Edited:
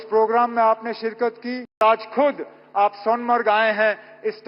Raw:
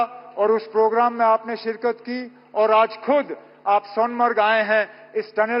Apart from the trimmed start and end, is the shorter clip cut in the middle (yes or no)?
yes